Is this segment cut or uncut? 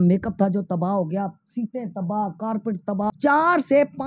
cut